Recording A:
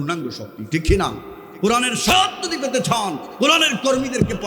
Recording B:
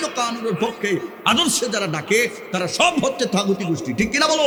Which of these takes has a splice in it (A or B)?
A